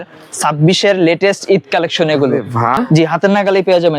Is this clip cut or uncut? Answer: cut